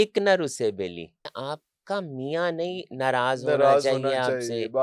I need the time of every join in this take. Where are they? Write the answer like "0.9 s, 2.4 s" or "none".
1.2 s